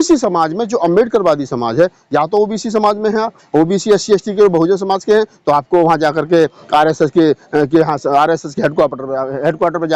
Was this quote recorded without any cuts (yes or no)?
yes